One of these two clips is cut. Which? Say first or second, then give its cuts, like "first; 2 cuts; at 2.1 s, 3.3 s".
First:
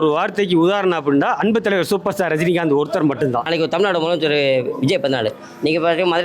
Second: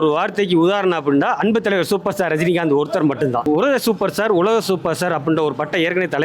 first; 1 cut; at 3.4 s